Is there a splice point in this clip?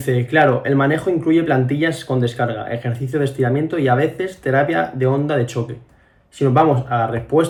no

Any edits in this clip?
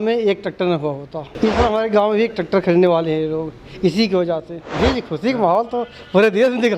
yes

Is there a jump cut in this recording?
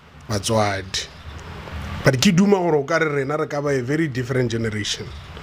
no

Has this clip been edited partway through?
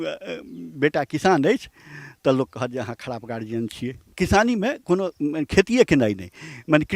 yes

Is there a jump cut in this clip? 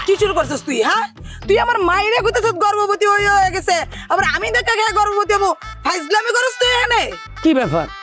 no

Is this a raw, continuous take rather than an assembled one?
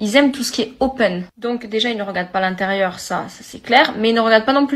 no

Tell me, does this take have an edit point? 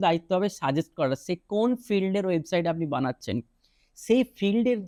no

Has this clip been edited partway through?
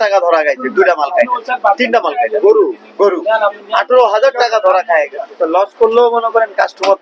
yes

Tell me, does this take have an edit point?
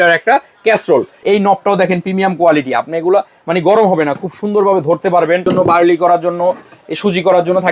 yes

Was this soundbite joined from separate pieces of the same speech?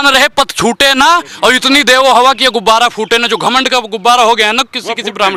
no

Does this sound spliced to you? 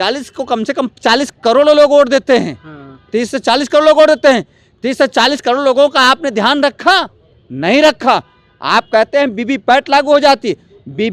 no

